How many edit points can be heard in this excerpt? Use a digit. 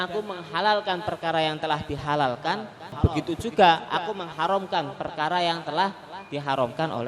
1